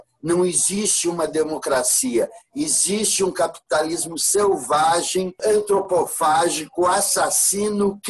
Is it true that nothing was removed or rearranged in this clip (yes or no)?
no